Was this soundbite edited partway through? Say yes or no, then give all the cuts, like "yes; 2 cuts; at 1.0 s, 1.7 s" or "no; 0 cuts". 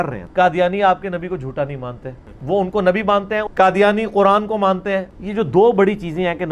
no; 0 cuts